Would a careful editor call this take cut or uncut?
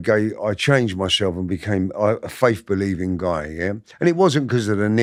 uncut